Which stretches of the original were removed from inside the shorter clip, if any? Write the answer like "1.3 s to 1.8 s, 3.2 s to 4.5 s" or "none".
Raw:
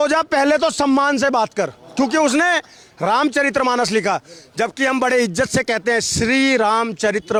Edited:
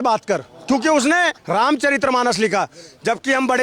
2.7 s to 2.9 s